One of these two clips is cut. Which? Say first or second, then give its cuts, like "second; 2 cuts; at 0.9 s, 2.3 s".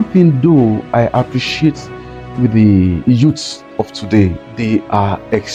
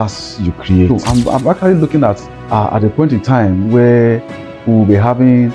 second; 1 cut; at 1.1 s